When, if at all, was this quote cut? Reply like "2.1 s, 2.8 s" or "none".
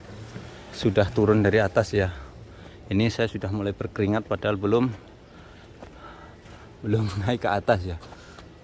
none